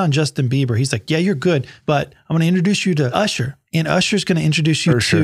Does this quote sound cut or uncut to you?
cut